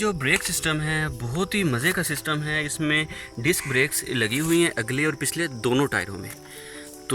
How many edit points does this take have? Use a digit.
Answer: 0